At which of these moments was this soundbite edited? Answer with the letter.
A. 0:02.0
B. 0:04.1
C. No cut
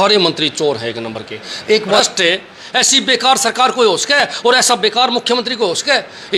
A